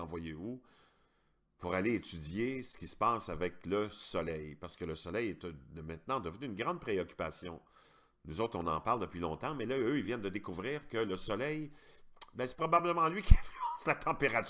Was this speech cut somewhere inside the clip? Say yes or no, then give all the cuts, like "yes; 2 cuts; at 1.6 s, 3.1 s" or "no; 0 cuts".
yes; 1 cut; at 10.9 s